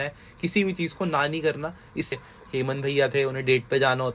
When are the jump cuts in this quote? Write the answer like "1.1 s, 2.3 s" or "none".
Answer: 2.1 s